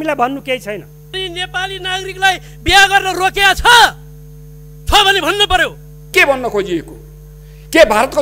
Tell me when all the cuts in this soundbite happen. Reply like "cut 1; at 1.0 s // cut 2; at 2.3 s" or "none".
cut 1; at 1.1 s // cut 2; at 6.1 s